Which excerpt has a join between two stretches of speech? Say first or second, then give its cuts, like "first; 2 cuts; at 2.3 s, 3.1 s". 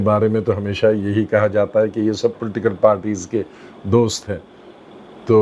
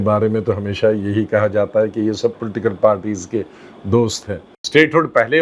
second; 1 cut; at 4.5 s